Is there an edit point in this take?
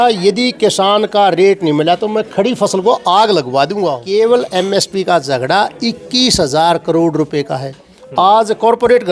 yes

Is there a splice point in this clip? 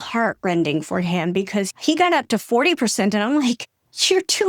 yes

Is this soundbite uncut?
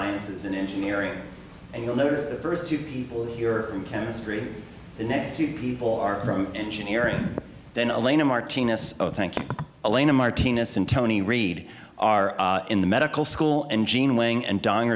no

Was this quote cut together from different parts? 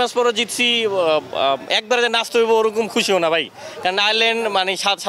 no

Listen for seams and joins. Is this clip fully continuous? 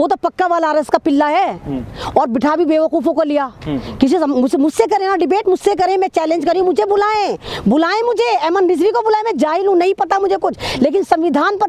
yes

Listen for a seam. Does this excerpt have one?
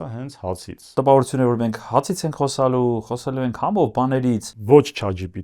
yes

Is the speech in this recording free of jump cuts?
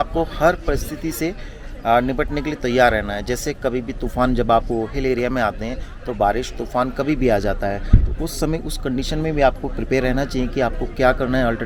yes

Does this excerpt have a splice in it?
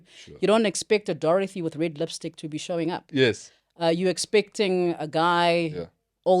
no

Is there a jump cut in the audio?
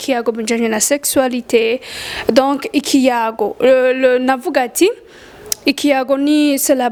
no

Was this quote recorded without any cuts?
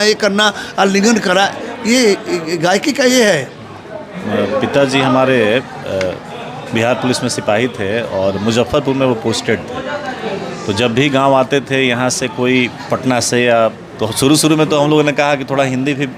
no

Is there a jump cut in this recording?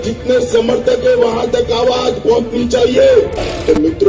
no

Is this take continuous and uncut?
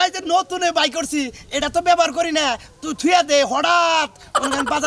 yes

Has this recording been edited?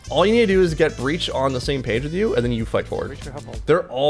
no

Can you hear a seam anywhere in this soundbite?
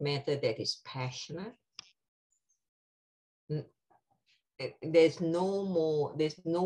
no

